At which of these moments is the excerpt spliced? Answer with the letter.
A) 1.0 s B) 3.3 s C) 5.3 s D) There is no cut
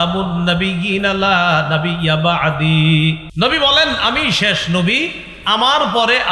B